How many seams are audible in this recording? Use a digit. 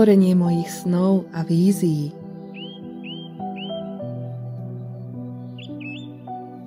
1